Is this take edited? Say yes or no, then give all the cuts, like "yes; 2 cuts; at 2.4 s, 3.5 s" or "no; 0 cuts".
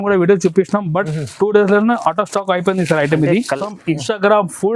yes; 1 cut; at 3.7 s